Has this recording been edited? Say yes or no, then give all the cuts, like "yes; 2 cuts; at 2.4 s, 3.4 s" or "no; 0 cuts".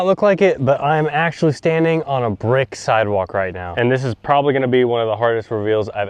yes; 1 cut; at 3.7 s